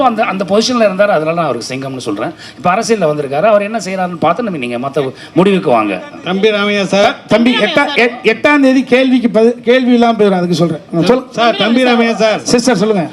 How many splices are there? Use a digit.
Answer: 0